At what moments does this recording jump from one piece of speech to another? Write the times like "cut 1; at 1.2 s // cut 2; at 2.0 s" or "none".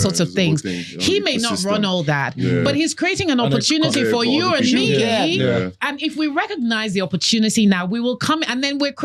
none